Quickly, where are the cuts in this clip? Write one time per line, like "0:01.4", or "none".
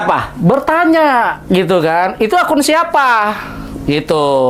none